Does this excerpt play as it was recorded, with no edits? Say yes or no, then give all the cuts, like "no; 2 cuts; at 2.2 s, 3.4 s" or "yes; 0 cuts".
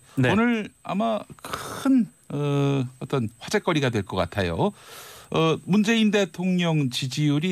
no; 1 cut; at 3.9 s